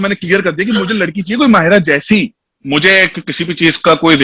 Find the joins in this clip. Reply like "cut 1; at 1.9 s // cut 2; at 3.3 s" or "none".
cut 1; at 2.5 s